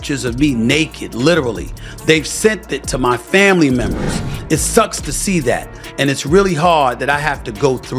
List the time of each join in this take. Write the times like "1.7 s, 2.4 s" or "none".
none